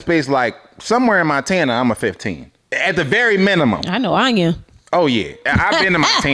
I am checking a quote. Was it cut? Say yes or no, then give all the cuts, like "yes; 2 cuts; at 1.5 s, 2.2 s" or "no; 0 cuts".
yes; 1 cut; at 5.4 s